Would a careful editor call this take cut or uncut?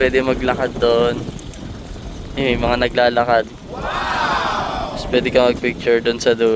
cut